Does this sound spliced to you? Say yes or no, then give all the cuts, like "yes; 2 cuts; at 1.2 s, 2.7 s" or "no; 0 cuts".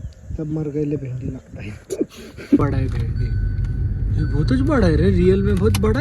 yes; 1 cut; at 2.6 s